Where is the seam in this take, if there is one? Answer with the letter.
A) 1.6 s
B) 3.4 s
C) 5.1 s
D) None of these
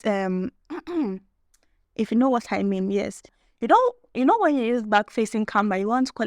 B